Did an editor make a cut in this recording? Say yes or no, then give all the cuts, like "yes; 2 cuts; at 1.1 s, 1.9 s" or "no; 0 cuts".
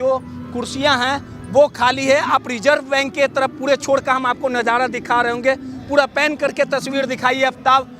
no; 0 cuts